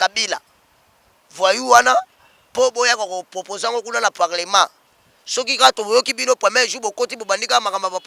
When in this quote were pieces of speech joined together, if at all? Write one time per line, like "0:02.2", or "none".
none